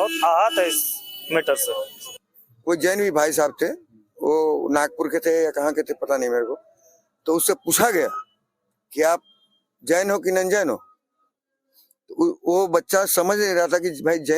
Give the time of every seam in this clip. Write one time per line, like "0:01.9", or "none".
0:01.9

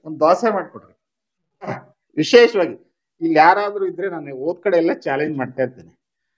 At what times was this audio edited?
0:01.9

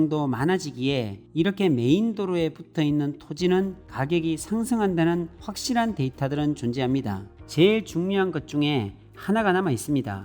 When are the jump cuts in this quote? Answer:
0:07.4

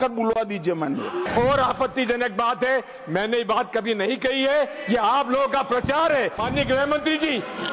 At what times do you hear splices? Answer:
0:01.3
0:06.4

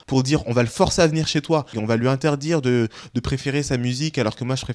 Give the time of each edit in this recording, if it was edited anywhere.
0:01.8

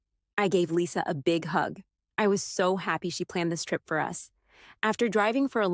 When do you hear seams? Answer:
none

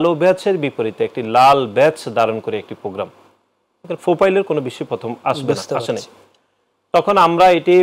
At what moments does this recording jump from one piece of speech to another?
none

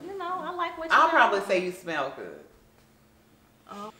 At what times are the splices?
none

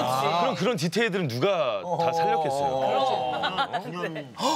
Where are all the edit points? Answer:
0:03.5

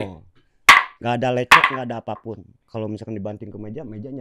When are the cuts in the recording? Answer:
0:00.9
0:02.5

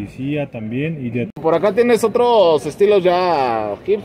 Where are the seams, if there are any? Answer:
0:01.3

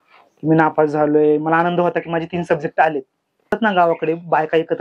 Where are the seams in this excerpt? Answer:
0:03.5

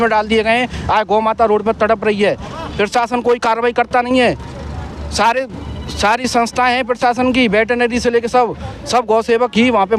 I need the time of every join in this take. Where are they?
none

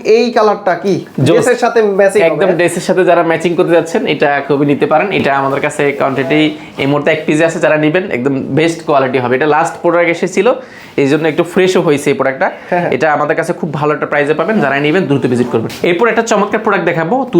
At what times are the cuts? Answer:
none

